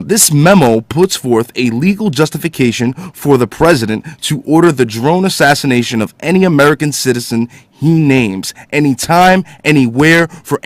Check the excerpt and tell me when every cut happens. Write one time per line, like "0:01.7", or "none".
0:02.2

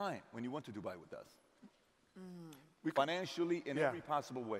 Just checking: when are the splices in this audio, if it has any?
none

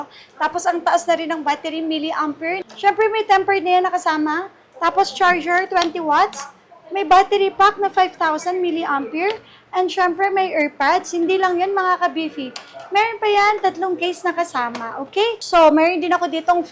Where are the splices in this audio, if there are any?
0:02.6
0:15.4

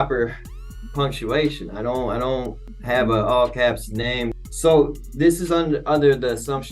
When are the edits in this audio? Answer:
0:02.7
0:04.3

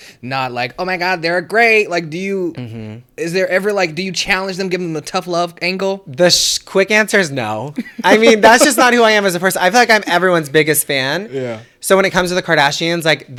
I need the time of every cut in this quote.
none

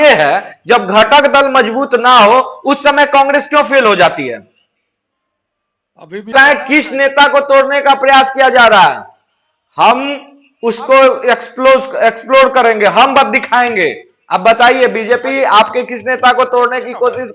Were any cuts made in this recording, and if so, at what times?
0:06.3

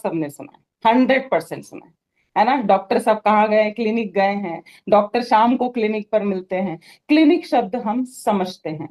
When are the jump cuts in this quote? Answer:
none

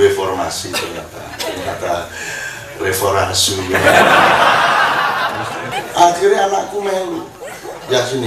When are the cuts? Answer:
0:05.7

